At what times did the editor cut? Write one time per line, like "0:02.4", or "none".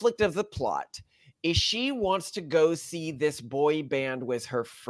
none

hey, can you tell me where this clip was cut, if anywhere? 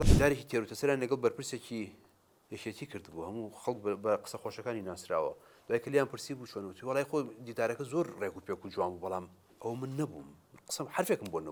none

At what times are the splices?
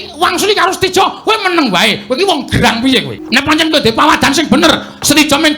0:03.2

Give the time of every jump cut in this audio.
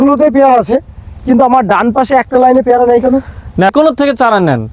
0:03.7

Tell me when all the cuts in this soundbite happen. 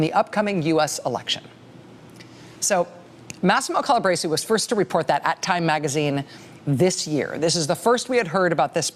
0:08.0

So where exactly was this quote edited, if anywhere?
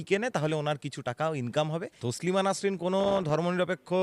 0:01.9

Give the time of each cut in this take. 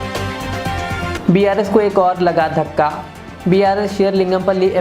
0:01.1

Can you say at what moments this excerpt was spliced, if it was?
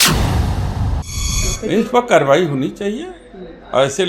0:01.2

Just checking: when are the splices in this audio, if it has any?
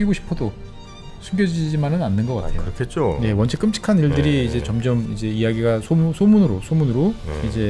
none

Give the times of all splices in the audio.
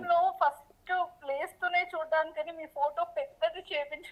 none

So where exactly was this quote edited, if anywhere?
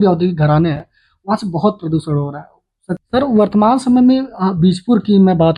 0:03.0

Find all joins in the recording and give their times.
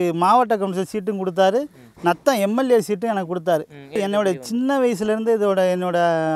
0:03.9

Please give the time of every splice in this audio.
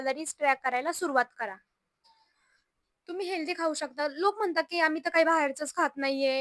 0:01.9

